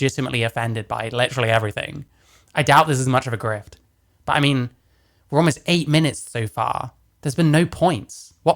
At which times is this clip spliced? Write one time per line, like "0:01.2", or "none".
none